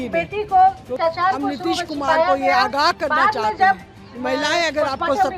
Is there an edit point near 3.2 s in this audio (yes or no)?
no